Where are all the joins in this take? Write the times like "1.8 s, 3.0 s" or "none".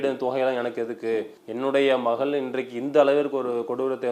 1.4 s